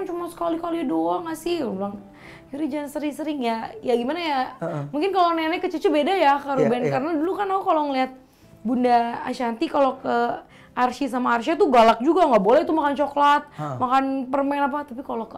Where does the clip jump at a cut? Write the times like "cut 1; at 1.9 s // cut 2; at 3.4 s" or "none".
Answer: none